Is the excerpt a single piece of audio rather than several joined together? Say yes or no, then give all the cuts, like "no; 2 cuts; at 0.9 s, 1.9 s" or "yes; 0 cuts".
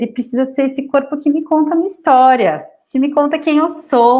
no; 1 cut; at 2.7 s